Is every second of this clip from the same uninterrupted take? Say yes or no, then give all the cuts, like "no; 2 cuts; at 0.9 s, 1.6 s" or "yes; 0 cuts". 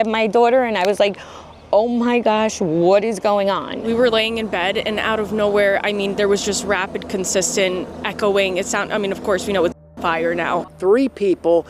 no; 1 cut; at 10.7 s